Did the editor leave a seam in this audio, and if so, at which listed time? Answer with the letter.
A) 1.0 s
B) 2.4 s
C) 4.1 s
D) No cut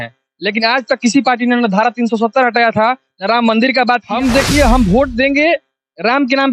C